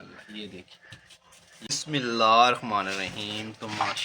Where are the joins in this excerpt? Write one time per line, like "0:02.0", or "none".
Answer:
0:01.8